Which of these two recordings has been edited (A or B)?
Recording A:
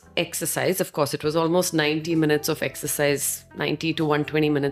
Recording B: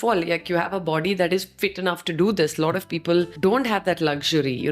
B